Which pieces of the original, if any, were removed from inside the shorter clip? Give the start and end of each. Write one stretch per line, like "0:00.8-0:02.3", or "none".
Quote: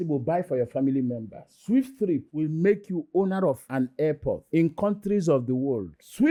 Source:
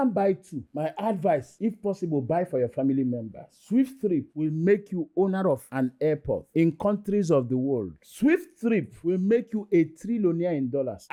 none